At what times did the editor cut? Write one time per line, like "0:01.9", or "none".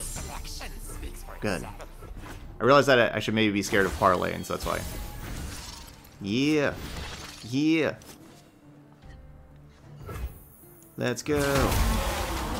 none